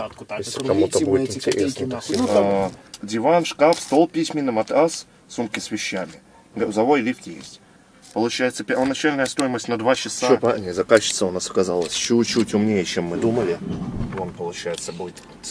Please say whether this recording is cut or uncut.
cut